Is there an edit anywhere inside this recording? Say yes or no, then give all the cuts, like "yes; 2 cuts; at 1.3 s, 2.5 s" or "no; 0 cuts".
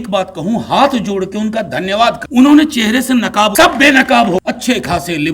yes; 3 cuts; at 2.2 s, 3.5 s, 4.4 s